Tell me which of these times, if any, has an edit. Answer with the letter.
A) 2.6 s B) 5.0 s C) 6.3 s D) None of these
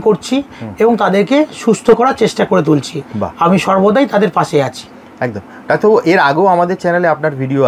D